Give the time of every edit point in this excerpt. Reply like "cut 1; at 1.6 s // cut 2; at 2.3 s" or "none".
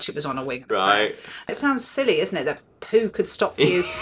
cut 1; at 1.5 s